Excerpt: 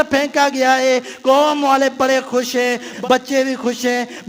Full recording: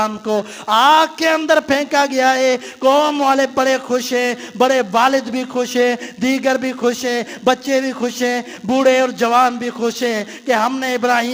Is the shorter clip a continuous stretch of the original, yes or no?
no